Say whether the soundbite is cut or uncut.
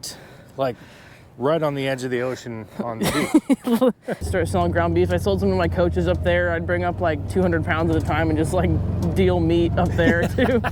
cut